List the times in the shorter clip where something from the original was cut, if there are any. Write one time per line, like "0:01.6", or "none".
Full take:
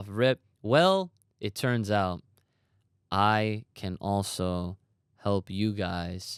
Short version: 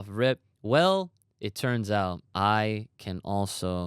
0:02.2